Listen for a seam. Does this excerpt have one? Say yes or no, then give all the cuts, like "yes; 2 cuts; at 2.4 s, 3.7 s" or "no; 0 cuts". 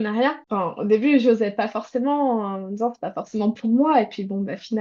no; 0 cuts